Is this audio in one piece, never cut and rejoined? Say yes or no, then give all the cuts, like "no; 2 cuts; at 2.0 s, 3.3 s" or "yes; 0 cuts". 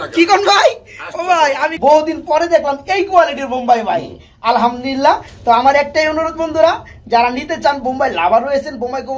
no; 1 cut; at 1.7 s